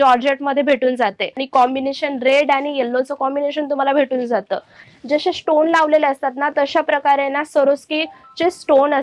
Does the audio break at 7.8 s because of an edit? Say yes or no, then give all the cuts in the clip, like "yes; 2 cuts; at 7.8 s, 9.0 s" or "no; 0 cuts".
no; 2 cuts; at 1.4 s, 4.9 s